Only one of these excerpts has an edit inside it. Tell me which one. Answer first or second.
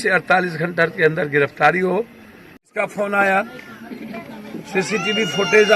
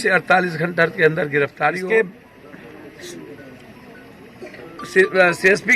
second